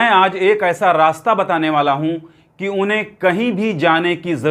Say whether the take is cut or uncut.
uncut